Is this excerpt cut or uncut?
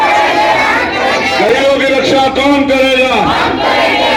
uncut